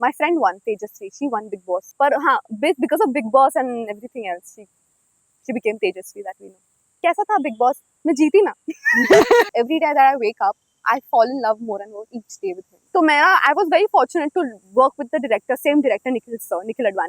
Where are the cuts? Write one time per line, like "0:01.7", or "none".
0:01.9
0:07.0
0:09.5
0:12.7